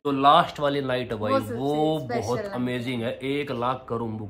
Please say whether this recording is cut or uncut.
uncut